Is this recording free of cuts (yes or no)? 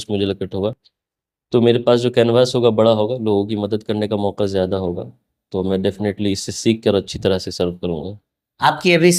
yes